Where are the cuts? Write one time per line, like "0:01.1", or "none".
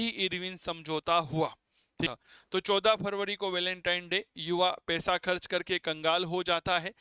0:02.1